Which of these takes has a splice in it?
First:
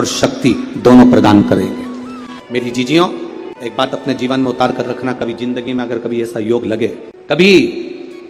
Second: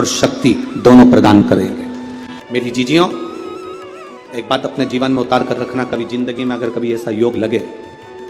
first; 2 cuts; at 3.7 s, 7.1 s

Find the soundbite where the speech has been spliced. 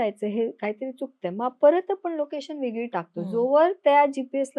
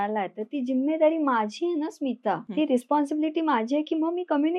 second; 1 cut; at 2.4 s

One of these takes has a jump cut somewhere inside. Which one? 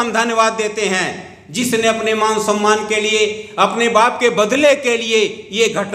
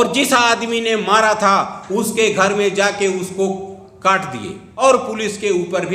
second; 1 cut; at 4.7 s

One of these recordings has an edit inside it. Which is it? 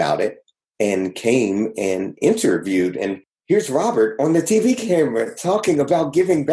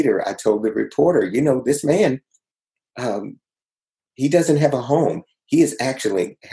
first; 1 cut; at 3.3 s

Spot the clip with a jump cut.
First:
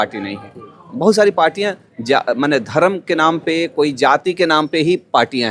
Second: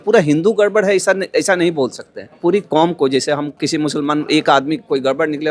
second; 1 cut; at 2.4 s

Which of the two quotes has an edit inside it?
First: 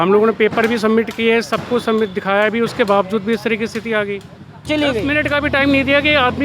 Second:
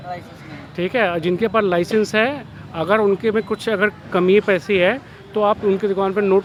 first; 1 cut; at 4.7 s

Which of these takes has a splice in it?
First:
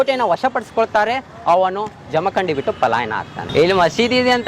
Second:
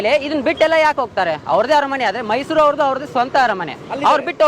first; 1 cut; at 3.5 s

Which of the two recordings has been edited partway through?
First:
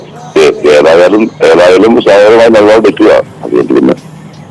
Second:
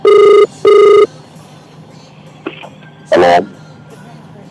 second; 1 cut; at 1.1 s

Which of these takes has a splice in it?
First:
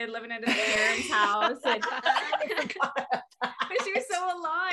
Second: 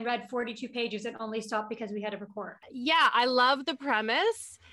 second; 1 cut; at 2.6 s

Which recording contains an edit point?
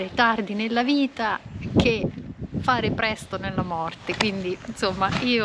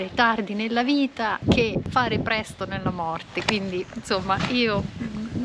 second; 1 cut; at 1.6 s

